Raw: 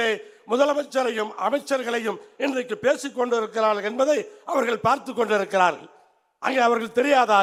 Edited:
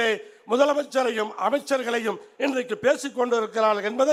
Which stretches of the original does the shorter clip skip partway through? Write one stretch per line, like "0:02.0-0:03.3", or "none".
none

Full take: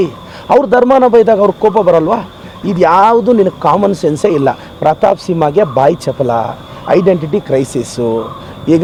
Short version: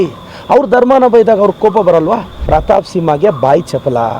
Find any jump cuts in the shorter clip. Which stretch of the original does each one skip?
0:02.3-0:04.7

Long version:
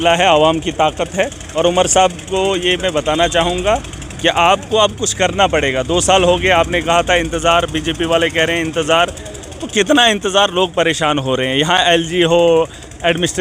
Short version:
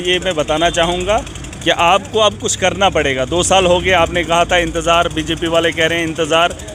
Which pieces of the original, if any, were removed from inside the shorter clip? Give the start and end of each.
none

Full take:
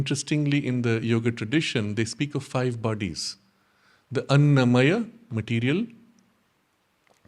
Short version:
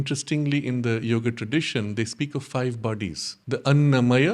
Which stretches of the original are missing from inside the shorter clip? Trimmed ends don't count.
0:03.3-0:03.9

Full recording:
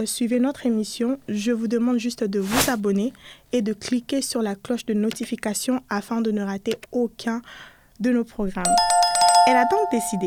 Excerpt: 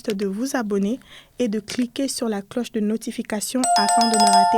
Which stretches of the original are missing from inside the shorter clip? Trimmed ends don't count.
0:05.8-0:08.7

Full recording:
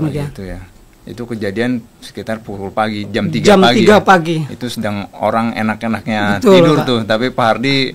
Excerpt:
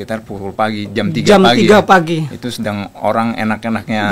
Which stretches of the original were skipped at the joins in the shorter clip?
none

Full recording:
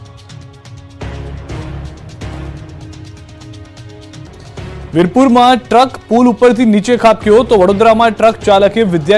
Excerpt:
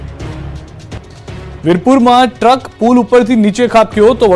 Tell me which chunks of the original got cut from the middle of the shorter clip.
0:02.3-0:04.3

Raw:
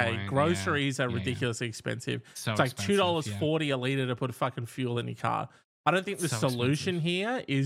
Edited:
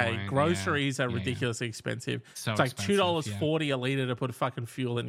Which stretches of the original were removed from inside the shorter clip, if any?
none

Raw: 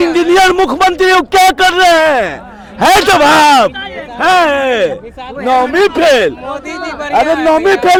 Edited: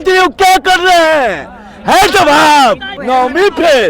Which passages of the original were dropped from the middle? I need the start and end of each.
0:03.8-0:05.3

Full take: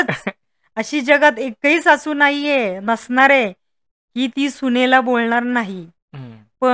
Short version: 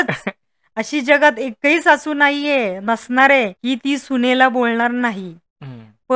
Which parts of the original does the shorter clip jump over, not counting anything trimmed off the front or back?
0:03.6-0:04.1

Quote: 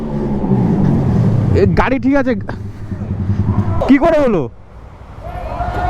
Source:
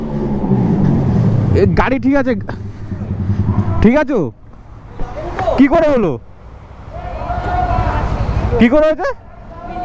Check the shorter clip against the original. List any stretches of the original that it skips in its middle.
0:03.8-0:05.5

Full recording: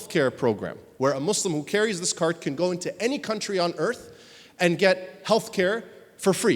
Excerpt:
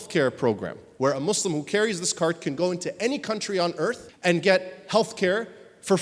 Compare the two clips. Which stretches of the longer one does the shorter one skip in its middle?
0:04.1-0:04.4

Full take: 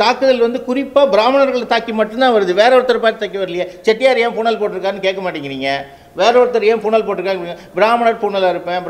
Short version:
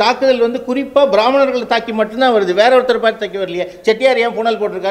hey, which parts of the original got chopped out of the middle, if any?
none

